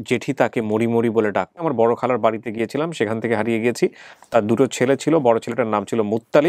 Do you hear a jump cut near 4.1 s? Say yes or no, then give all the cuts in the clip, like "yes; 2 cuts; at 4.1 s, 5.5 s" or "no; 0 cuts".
yes; 2 cuts; at 1.6 s, 4.1 s